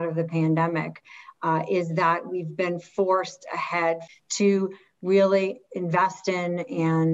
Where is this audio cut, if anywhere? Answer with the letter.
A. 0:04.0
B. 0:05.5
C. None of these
A